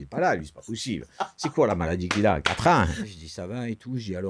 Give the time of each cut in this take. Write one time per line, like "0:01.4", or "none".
0:03.1